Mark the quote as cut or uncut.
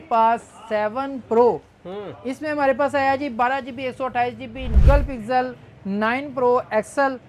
cut